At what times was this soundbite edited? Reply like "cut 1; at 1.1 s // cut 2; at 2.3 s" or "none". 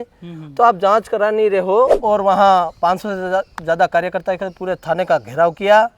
cut 1; at 2.0 s